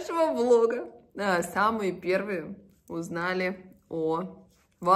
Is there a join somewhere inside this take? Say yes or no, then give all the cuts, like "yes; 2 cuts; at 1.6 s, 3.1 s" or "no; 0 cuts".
no; 0 cuts